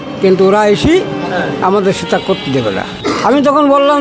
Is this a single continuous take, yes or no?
no